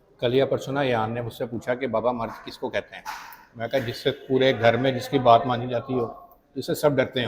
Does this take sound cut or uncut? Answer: uncut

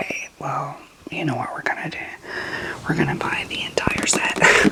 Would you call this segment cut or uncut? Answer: uncut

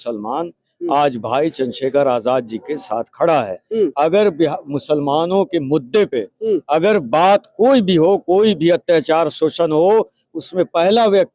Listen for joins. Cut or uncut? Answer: uncut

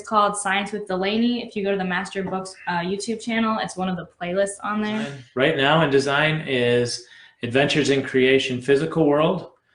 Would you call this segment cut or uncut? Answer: cut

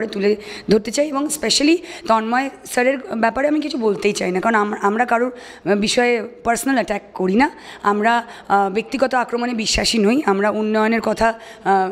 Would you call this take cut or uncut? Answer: uncut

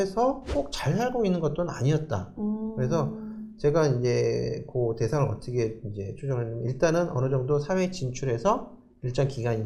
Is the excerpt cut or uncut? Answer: uncut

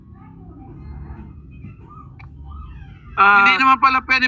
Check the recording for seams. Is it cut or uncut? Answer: uncut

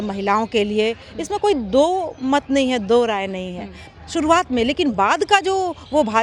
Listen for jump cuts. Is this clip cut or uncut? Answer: uncut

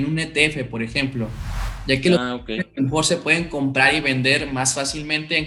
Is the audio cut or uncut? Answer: uncut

